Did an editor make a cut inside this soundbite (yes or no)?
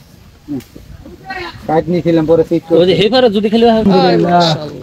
yes